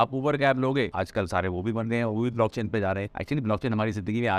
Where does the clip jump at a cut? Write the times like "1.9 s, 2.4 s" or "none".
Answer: 0.9 s, 3.1 s